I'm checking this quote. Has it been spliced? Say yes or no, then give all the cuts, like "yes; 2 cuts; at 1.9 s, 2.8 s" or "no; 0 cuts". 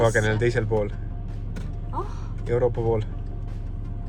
no; 0 cuts